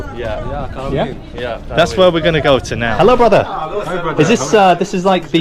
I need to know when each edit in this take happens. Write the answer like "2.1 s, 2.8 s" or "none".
2.9 s